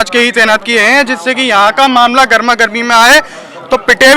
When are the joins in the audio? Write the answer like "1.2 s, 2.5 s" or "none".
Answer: none